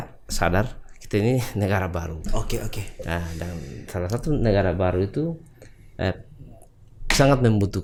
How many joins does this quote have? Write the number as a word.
zero